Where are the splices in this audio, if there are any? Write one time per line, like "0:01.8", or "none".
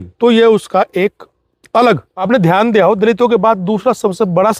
0:02.2